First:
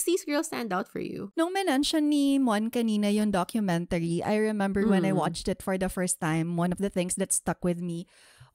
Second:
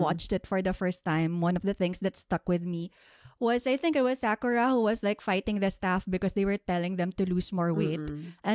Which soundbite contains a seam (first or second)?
first